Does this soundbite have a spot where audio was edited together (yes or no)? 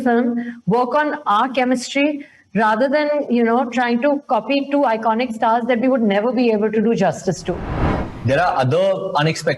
yes